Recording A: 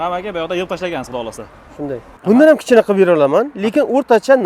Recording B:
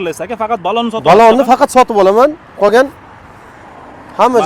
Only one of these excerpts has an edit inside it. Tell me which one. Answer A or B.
A